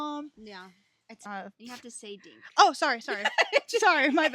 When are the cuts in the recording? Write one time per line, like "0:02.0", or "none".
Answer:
0:01.2